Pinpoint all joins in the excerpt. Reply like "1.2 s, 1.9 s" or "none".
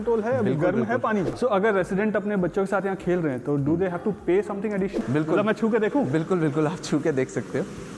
1.3 s, 5.0 s